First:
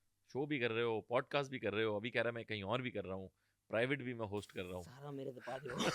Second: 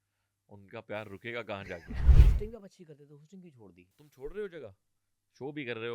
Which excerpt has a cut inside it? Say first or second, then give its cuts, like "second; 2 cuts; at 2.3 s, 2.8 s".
second; 2 cuts; at 2.2 s, 4.1 s